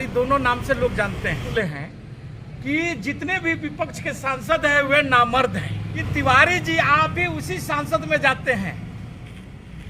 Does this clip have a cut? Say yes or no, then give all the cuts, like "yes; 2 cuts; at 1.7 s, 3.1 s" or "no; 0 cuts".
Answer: yes; 2 cuts; at 1.5 s, 6.0 s